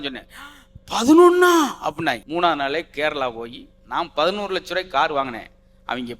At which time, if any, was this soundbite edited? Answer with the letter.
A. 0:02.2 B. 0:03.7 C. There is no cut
A